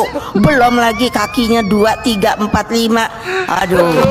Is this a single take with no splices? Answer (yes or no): yes